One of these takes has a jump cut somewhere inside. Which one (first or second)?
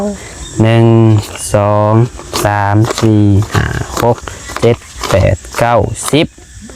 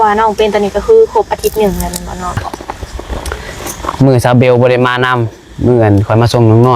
second